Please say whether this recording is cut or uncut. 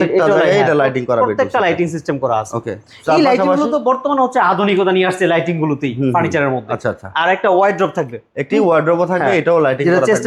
uncut